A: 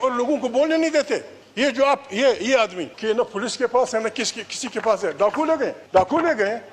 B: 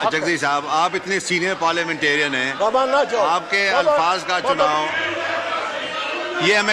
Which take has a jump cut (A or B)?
A